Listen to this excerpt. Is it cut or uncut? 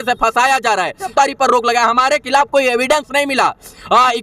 cut